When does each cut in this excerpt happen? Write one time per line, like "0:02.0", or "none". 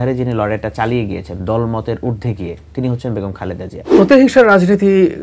0:03.9